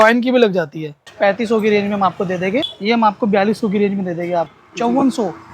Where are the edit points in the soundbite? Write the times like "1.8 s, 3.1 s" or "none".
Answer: 1.1 s, 2.7 s, 4.5 s